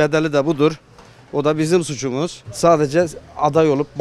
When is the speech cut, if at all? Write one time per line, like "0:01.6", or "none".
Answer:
0:02.4